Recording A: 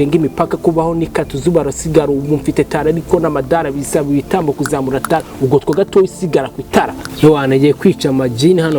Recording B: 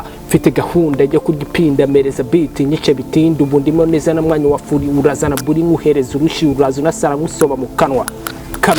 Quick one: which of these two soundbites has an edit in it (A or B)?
A